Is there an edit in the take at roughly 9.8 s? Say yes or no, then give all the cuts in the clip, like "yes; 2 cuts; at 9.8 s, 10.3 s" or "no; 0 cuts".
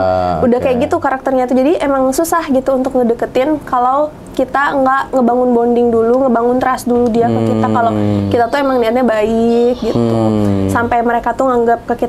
no; 0 cuts